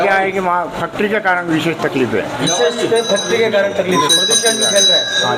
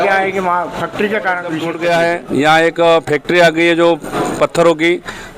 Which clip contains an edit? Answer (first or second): second